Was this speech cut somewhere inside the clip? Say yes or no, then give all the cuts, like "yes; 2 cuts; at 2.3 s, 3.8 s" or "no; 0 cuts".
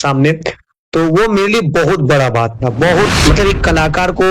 yes; 1 cut; at 3.1 s